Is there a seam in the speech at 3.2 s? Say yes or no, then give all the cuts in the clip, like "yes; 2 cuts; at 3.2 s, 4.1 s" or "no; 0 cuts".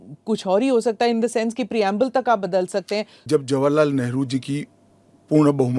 yes; 1 cut; at 3.2 s